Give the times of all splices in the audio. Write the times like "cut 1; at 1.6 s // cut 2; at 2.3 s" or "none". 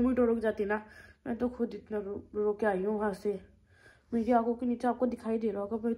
none